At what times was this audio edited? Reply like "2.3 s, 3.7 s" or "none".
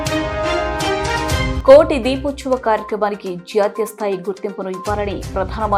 none